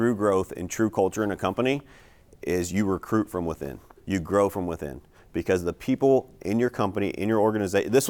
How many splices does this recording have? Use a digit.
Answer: 0